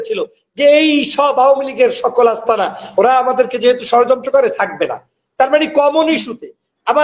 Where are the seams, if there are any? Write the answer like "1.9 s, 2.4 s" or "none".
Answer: none